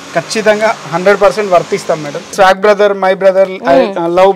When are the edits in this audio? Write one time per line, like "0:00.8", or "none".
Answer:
0:02.3